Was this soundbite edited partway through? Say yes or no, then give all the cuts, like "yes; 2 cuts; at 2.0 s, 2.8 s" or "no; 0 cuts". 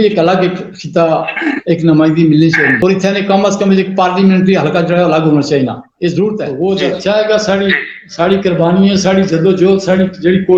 yes; 2 cuts; at 2.8 s, 6.4 s